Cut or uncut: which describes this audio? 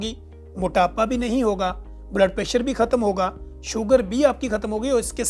uncut